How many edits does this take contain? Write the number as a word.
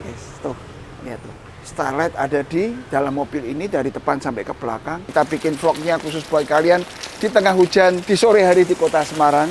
two